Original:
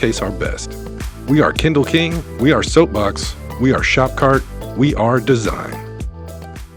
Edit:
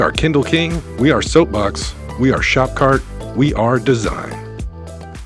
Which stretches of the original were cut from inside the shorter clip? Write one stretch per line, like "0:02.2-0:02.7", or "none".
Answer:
none